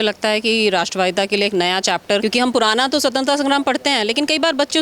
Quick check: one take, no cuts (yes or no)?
no